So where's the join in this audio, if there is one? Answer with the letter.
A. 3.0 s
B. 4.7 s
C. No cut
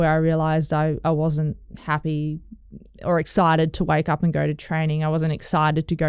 C